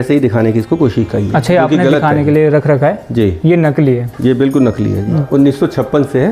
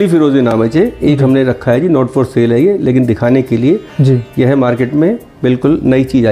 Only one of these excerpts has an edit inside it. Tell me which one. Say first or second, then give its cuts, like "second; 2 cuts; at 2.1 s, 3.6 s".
first; 1 cut; at 5.2 s